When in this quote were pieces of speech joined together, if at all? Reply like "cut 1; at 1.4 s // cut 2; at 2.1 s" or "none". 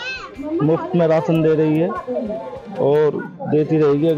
none